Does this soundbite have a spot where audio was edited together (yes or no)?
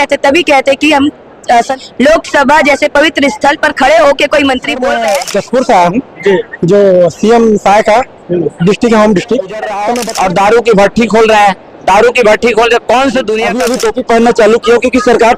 yes